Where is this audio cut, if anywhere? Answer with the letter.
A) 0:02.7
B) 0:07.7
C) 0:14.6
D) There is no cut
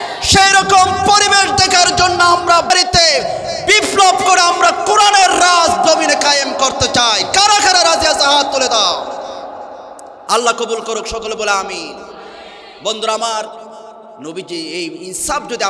A